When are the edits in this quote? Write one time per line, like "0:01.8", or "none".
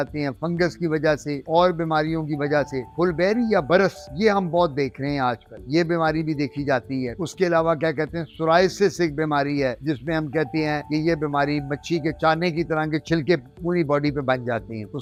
none